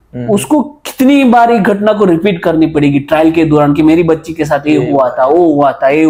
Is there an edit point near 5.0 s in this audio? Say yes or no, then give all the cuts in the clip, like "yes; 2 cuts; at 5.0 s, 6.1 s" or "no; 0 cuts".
no; 0 cuts